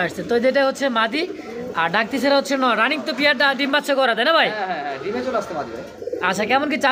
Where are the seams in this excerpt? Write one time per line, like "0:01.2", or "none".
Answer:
none